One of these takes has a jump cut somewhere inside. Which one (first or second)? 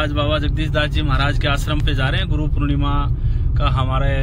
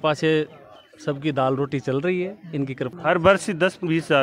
second